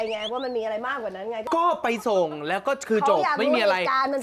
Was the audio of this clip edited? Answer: yes; 1 cut; at 1.4 s

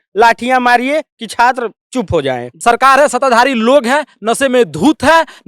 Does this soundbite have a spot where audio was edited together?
yes; 1 cut; at 2.5 s

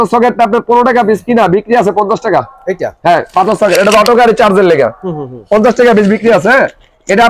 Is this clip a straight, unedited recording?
yes; 0 cuts

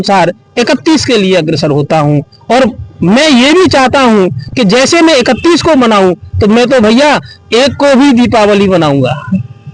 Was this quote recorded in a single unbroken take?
yes; 0 cuts

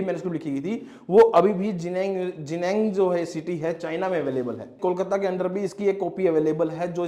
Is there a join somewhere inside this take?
yes; 1 cut; at 4.8 s

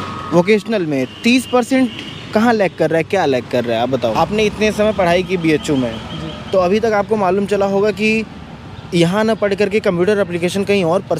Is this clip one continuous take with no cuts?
no; 1 cut; at 4.1 s

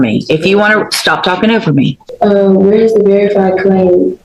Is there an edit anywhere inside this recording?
yes; 1 cut; at 2.0 s

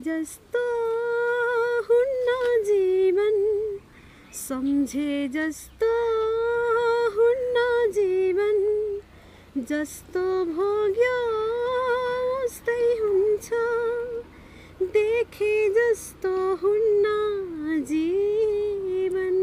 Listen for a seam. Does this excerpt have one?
no; 0 cuts

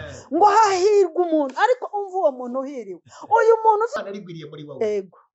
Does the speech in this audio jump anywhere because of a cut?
yes; 1 cut; at 4.0 s

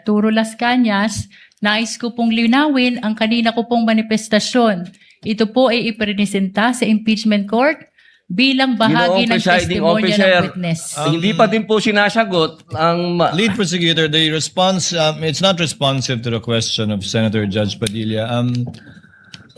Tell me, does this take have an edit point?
no; 0 cuts

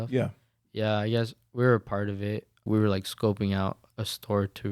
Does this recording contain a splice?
yes; 1 cut; at 2.6 s

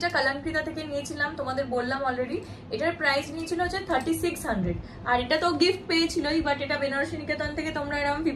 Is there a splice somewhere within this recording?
no; 0 cuts

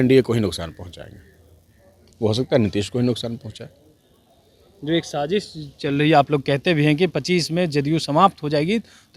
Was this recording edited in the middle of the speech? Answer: no; 0 cuts

